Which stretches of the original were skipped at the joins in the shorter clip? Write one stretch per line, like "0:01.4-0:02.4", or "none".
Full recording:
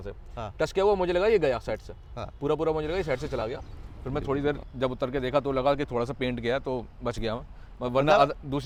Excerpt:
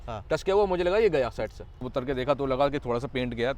0:02.2-0:04.9